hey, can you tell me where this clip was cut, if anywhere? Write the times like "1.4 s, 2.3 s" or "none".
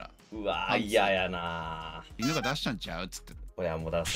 2.1 s